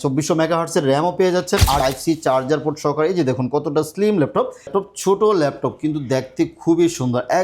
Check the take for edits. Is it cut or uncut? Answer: cut